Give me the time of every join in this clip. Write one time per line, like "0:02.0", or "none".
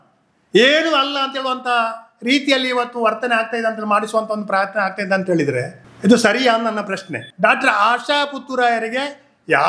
0:05.8
0:07.2